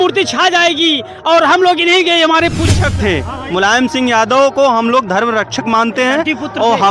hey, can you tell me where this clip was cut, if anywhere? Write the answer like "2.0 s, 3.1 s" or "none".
2.7 s